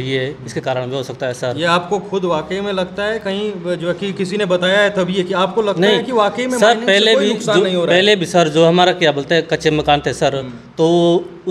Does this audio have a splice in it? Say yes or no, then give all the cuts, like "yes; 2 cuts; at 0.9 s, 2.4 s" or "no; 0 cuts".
no; 0 cuts